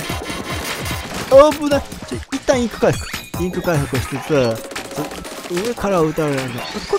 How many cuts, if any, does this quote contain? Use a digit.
0